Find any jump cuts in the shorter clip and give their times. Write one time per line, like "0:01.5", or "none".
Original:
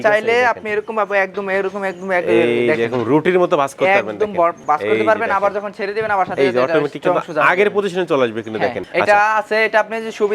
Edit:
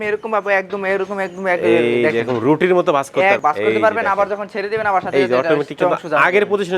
0:03.4